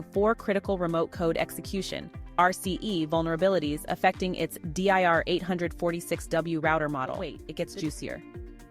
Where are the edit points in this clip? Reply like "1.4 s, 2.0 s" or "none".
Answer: 7.4 s

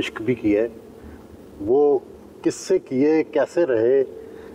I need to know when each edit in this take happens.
none

